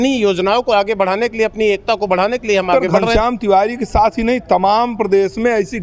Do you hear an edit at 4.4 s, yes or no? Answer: no